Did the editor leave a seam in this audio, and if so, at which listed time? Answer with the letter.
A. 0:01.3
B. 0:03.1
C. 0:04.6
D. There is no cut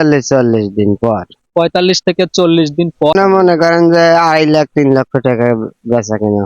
B